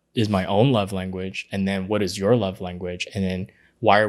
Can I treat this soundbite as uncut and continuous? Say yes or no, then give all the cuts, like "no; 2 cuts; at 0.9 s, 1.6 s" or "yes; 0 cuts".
yes; 0 cuts